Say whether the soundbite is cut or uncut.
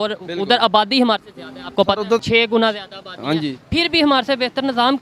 cut